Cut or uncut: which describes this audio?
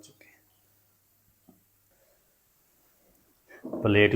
cut